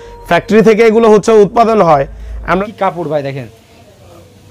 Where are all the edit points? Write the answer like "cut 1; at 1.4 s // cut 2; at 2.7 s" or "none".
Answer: cut 1; at 2.6 s